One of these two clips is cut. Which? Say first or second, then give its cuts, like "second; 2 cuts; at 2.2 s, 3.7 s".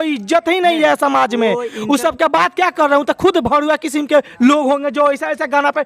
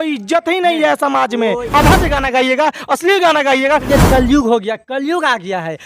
second; 2 cuts; at 1.7 s, 3.9 s